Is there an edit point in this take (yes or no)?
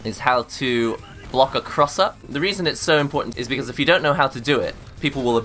yes